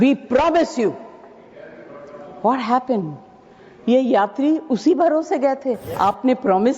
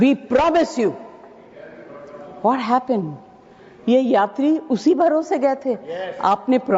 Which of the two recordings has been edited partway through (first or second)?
first